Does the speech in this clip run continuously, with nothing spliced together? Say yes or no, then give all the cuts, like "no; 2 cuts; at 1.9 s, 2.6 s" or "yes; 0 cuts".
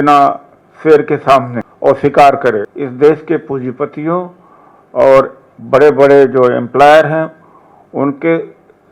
no; 2 cuts; at 1.6 s, 2.8 s